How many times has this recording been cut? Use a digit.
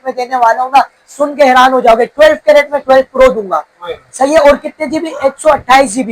0